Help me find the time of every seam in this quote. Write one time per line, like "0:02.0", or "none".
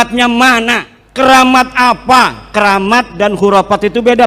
0:01.0